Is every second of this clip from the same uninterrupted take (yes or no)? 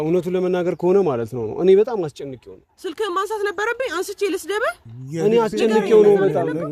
yes